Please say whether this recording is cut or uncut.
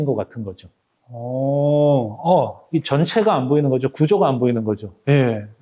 cut